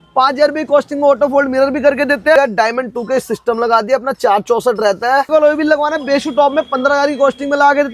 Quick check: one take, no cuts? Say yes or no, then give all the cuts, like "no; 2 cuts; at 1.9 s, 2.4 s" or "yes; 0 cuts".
no; 2 cuts; at 2.4 s, 5.3 s